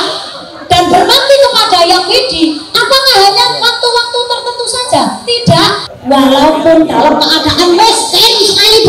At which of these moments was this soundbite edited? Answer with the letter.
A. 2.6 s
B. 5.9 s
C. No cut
B